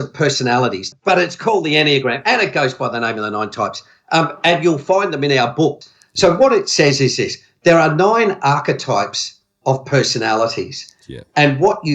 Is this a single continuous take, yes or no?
no